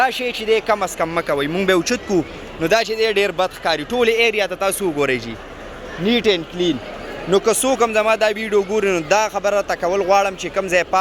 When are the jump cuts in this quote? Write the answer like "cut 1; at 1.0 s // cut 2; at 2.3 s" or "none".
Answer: none